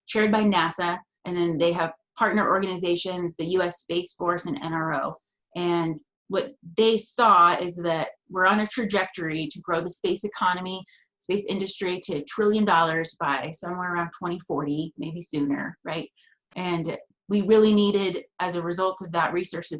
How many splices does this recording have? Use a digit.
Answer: 1